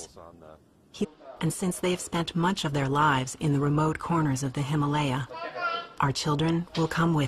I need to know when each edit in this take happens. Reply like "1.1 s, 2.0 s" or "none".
1.1 s